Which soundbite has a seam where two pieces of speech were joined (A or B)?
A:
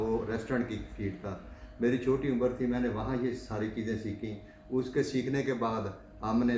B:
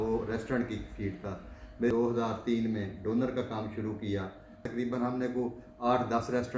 B